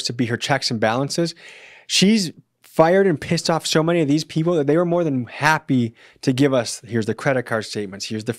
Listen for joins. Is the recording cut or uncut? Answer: uncut